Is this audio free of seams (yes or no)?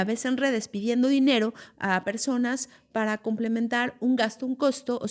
yes